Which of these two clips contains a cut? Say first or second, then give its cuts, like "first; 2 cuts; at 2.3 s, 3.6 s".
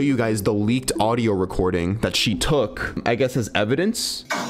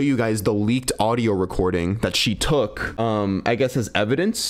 first; 1 cut; at 3.0 s